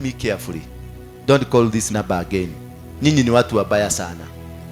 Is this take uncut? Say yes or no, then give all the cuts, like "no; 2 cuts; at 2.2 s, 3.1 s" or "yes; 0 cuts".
no; 1 cut; at 1.9 s